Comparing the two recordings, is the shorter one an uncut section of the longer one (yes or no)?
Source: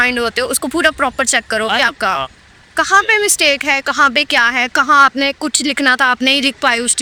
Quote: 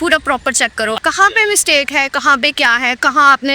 no